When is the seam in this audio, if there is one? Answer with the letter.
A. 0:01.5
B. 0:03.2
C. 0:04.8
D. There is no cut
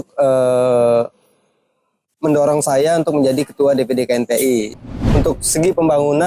C